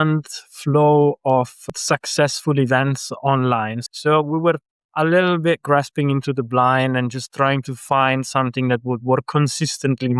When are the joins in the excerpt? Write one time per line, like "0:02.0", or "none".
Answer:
0:01.6
0:03.8